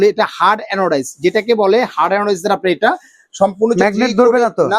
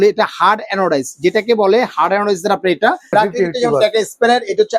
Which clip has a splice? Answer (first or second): second